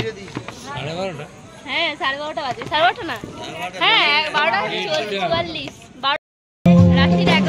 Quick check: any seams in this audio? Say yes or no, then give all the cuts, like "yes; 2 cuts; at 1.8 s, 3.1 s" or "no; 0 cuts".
yes; 1 cut; at 6.2 s